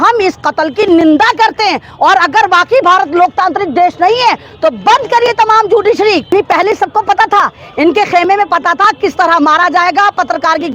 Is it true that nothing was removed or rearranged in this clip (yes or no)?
no